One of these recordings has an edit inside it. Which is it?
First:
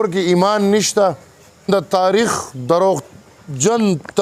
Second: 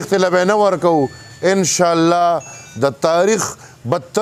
first; 1 cut; at 1.7 s

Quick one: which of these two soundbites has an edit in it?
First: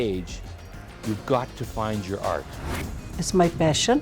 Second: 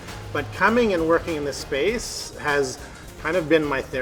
first; 1 cut; at 2.9 s

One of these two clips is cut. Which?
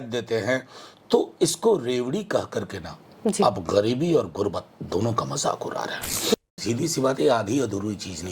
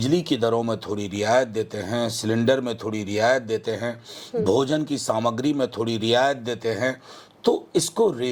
first; 1 cut; at 6.3 s

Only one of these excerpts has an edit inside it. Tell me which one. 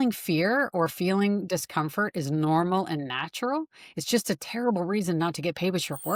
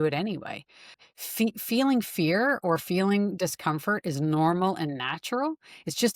second; 1 cut; at 1.0 s

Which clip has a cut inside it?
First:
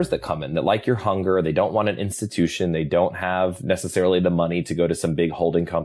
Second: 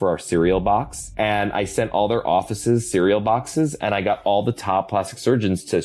second; 1 cut; at 1.0 s

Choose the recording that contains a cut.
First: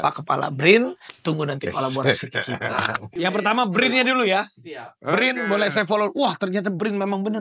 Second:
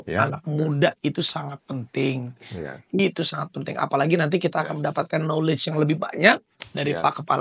first; 1 cut; at 2.6 s

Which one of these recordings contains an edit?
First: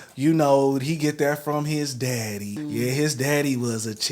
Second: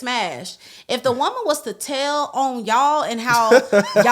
first; 1 cut; at 2.5 s

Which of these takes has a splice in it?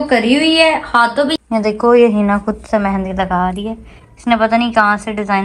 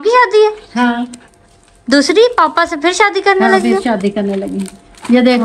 first; 1 cut; at 1.3 s

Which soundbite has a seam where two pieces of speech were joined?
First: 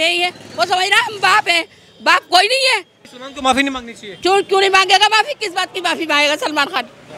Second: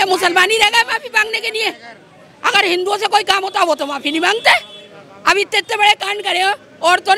first; 1 cut; at 3.0 s

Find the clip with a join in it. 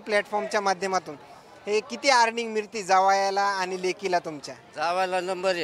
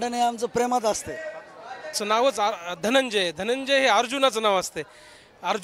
second; 1 cut; at 2.0 s

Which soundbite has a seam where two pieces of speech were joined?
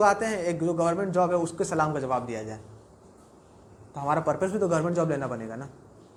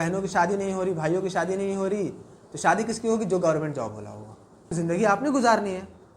second; 1 cut; at 4.7 s

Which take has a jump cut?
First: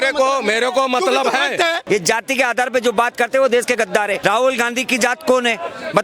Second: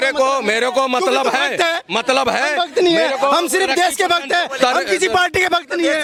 first; 2 cuts; at 1.8 s, 4.2 s

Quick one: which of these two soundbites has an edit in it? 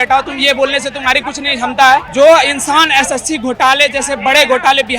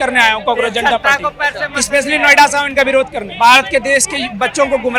first; 1 cut; at 2.1 s

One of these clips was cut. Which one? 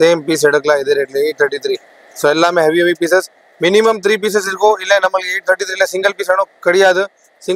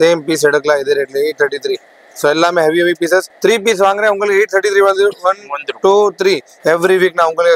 second; 2 cuts; at 3.3 s, 6.5 s

